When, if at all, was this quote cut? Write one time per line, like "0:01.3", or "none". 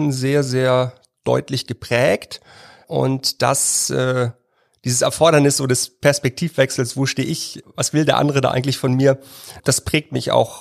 0:02.8
0:07.6
0:09.5